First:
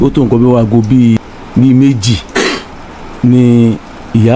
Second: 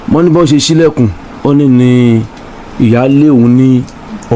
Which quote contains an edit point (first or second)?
first